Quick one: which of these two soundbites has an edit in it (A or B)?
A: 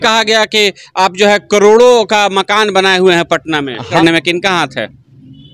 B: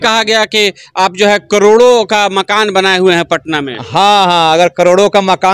A